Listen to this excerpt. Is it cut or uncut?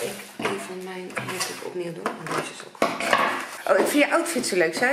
cut